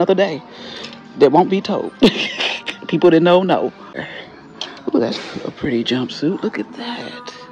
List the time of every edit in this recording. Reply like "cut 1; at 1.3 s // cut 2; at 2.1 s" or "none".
cut 1; at 4.1 s